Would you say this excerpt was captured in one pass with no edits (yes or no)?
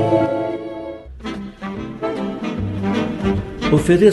no